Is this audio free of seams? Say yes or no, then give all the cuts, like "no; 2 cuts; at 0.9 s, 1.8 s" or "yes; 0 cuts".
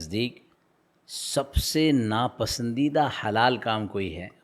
yes; 0 cuts